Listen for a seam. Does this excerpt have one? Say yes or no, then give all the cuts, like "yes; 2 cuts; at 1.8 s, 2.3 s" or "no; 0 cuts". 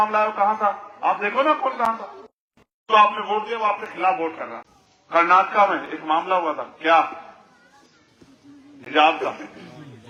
no; 0 cuts